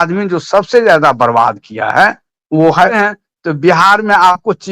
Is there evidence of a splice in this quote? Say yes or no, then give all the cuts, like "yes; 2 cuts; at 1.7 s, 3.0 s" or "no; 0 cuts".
yes; 1 cut; at 3.0 s